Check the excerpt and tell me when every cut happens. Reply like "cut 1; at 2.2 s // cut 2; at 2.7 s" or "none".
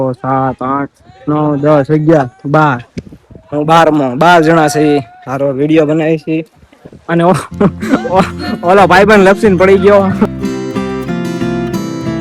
cut 1; at 10.3 s